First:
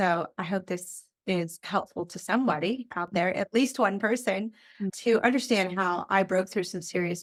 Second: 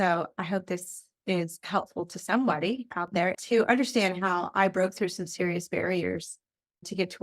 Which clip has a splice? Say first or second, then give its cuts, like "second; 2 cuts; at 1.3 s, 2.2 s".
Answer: second; 1 cut; at 3.4 s